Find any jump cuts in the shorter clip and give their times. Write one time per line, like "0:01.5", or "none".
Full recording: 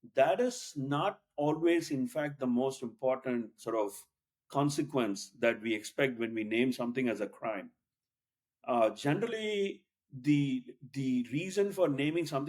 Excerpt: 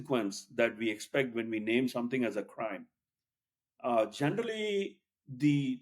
none